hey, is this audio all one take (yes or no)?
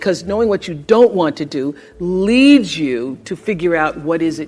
no